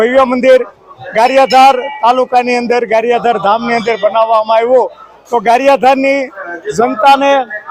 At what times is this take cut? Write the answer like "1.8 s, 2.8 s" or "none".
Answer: none